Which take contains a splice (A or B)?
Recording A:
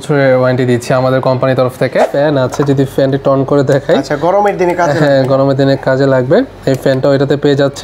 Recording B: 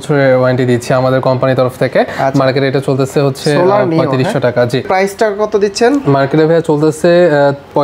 A